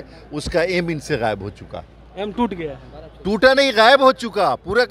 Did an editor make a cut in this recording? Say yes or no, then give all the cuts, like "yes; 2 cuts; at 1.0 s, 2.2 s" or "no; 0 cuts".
no; 0 cuts